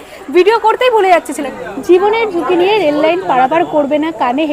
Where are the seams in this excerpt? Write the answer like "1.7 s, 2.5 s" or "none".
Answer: 1.4 s